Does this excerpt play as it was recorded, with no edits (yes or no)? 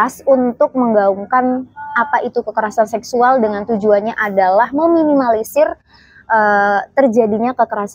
yes